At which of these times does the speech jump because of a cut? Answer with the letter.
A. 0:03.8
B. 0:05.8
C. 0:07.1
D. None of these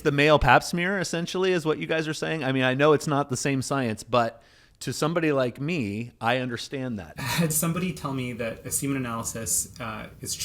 C